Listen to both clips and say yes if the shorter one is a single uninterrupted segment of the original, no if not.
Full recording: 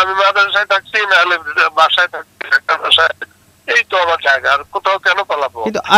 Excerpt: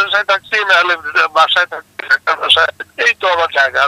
no